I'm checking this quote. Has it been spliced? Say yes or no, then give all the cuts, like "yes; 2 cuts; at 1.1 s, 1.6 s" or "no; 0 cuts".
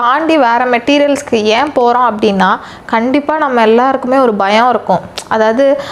no; 0 cuts